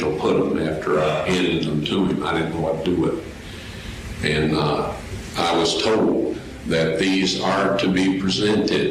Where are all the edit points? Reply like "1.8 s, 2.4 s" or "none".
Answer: none